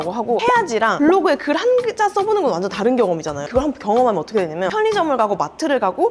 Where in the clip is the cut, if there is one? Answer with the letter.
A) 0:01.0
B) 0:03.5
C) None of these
B